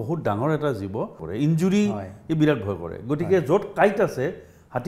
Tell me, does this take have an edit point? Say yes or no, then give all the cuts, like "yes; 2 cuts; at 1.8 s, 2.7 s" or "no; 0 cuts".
yes; 1 cut; at 1.2 s